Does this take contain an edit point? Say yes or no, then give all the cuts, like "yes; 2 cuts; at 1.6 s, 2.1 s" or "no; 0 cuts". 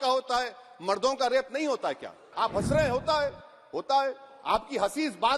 yes; 1 cut; at 2.2 s